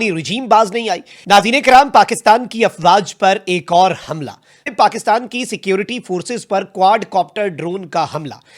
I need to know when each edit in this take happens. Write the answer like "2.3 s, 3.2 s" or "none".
1.1 s, 4.7 s